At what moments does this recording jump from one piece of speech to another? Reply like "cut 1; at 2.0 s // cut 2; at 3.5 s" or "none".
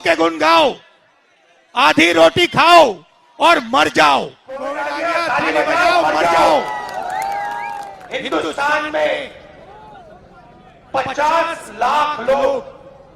cut 1; at 4.7 s // cut 2; at 7.9 s